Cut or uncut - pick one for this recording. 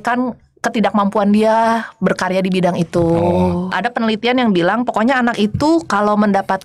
cut